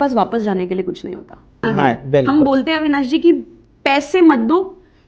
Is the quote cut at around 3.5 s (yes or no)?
no